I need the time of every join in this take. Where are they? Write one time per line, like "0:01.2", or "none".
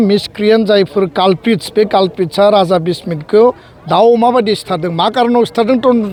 none